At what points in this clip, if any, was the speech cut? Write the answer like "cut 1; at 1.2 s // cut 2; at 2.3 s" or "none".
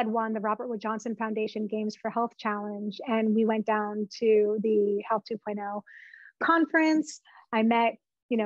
none

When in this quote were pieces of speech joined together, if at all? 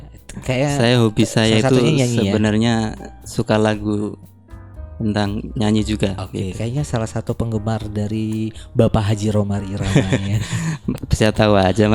none

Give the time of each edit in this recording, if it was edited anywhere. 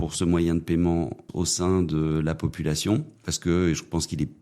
cut 1; at 1.3 s // cut 2; at 3.3 s

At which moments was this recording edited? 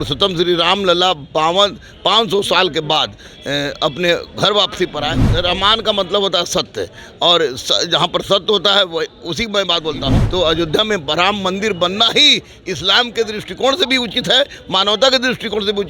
cut 1; at 5.3 s // cut 2; at 10.2 s

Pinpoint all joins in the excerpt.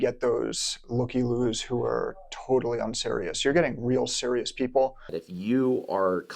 cut 1; at 5.1 s

